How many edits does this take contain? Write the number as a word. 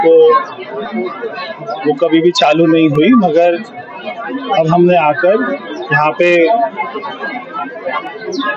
zero